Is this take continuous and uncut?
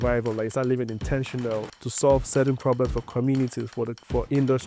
no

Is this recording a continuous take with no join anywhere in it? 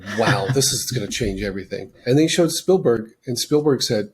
no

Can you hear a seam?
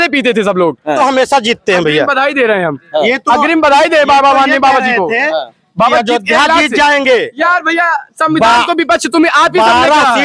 yes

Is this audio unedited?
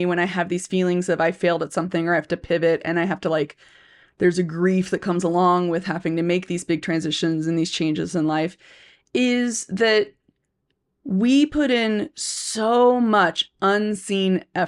yes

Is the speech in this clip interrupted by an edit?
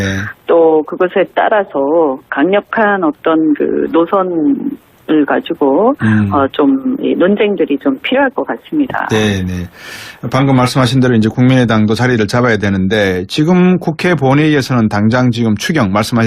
yes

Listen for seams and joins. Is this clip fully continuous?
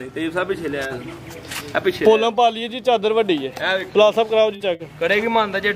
yes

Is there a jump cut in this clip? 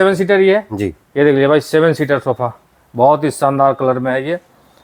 no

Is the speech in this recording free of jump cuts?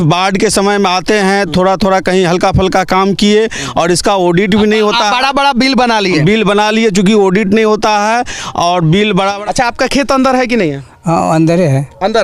no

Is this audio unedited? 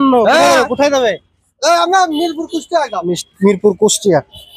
yes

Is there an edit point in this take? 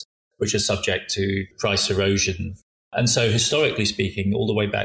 yes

